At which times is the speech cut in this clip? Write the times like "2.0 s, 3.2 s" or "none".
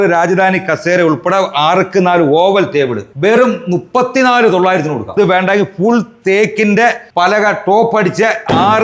5.1 s, 7.0 s